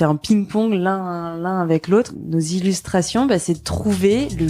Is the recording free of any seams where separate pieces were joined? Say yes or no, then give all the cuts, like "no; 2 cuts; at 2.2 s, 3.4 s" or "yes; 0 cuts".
no; 1 cut; at 2.2 s